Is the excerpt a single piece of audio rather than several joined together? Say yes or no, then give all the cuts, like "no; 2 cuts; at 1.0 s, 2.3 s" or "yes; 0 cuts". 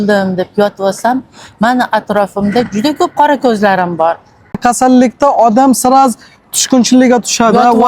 no; 1 cut; at 4.6 s